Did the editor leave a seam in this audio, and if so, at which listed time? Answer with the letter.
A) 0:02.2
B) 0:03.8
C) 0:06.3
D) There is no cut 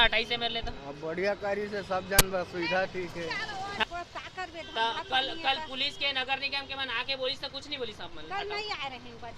B